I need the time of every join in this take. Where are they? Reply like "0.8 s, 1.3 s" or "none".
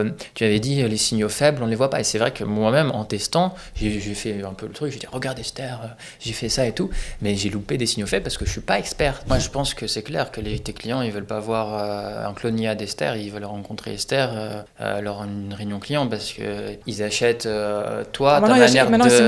9.3 s, 14.7 s, 16.8 s